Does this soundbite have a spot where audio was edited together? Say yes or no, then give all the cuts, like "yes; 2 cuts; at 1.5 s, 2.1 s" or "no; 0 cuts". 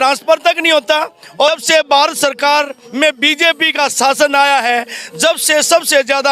yes; 1 cut; at 1.5 s